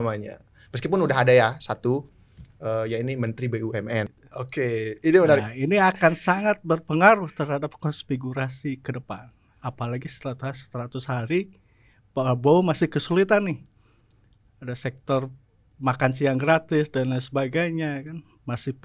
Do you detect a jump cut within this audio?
yes; 1 cut; at 4.1 s

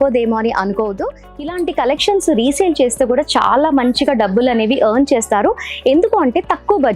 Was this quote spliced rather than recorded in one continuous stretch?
yes; 1 cut; at 1.3 s

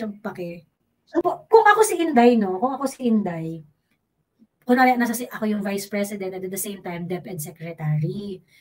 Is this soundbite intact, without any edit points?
no; 1 cut; at 1.2 s

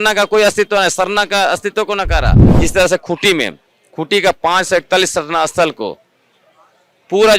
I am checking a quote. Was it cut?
yes; 1 cut; at 2.5 s

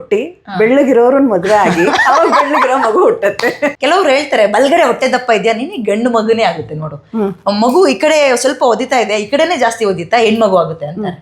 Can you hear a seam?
yes; 1 cut; at 3.7 s

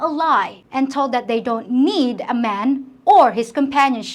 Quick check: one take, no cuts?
yes; 0 cuts

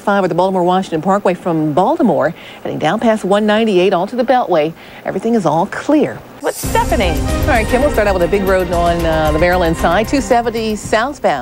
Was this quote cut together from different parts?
yes; 1 cut; at 6.3 s

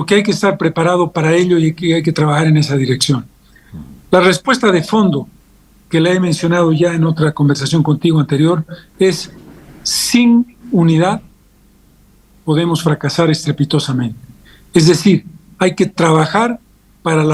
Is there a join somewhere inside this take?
no; 0 cuts

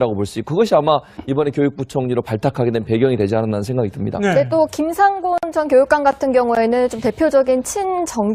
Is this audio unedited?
no; 1 cut; at 6.5 s

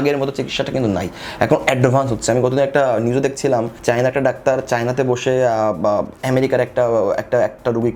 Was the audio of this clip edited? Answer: no; 0 cuts

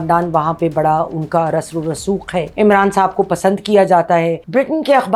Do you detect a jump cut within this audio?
no; 0 cuts

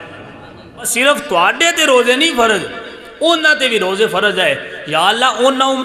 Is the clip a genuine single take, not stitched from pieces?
no; 1 cut; at 0.9 s

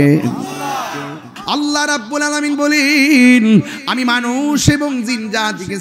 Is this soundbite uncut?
no; 1 cut; at 1.3 s

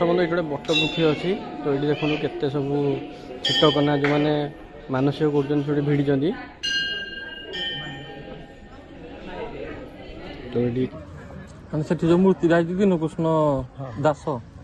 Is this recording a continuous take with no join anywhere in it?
no; 1 cut; at 11.0 s

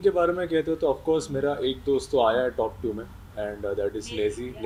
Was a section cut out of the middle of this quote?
no; 0 cuts

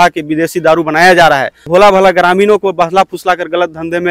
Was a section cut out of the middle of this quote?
yes; 1 cut; at 1.7 s

